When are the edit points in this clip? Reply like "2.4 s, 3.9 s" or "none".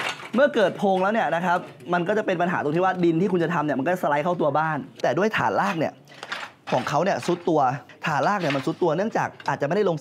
5.0 s, 7.9 s